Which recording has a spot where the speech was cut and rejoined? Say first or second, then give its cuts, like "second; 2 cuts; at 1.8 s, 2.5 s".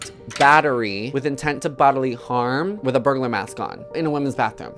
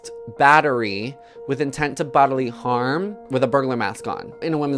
first; 2 cuts; at 1.0 s, 2.8 s